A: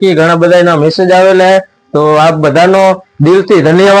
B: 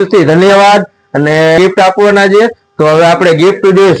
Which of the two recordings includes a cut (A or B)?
B